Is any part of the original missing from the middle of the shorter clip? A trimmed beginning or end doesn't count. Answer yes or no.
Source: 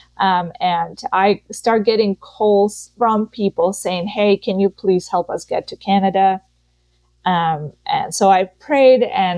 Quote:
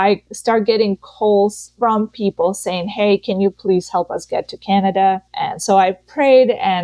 yes